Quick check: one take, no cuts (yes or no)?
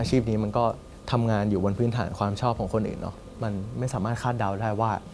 no